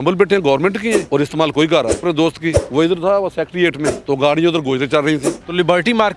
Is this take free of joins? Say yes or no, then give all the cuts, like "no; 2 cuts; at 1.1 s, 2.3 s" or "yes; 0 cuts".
no; 4 cuts; at 1.1 s, 2.3 s, 3.9 s, 5.3 s